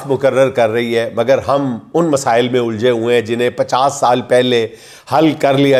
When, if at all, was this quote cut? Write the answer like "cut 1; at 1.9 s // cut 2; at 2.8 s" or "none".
none